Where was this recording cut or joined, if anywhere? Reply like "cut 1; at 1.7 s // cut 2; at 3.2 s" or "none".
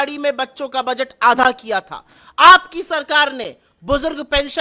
none